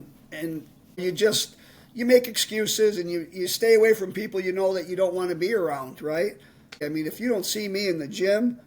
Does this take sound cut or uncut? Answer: cut